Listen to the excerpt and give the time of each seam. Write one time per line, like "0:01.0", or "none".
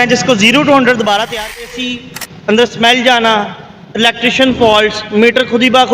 0:01.7